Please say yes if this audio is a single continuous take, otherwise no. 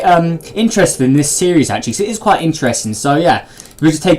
no